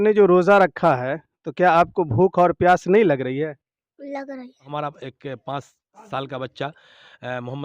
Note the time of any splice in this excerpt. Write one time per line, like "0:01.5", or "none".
0:04.7